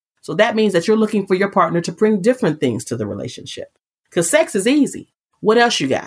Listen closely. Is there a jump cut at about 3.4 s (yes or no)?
no